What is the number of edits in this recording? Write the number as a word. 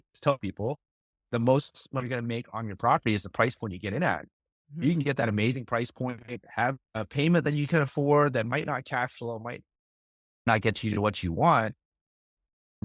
one